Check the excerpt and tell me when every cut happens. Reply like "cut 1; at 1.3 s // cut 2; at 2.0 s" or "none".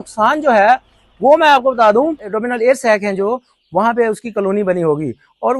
cut 1; at 2.3 s